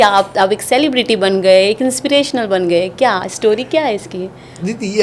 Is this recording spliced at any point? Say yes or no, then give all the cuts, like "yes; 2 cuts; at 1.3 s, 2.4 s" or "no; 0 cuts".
no; 0 cuts